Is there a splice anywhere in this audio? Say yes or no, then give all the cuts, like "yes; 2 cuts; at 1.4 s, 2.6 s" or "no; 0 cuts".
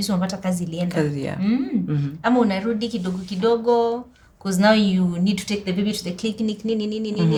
no; 0 cuts